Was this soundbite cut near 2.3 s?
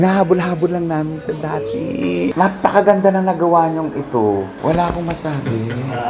yes; 1 cut; at 2.3 s

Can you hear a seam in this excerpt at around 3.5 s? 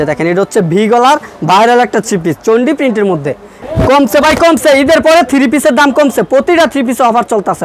yes; 1 cut; at 3.5 s

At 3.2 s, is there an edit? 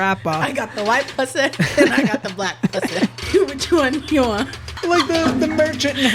yes; 2 cuts; at 3.2 s, 4.7 s

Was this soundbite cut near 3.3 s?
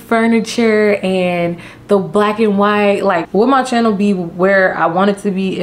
yes; 1 cut; at 3.3 s

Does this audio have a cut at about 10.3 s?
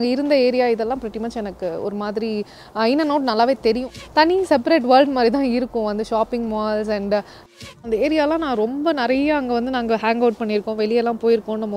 no; 2 cuts; at 4.0 s, 7.5 s

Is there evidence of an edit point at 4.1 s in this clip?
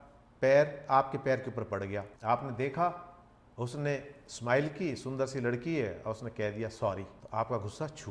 no; 2 cuts; at 2.1 s, 7.2 s

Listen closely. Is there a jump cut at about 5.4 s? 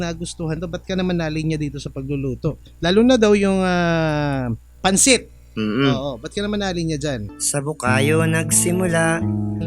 no; 1 cut; at 7.3 s

